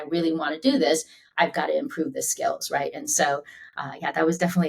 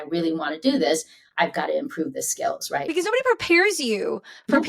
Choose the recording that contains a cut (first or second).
second